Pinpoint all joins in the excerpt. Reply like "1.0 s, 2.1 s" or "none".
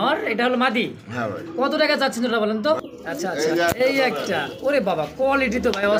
2.8 s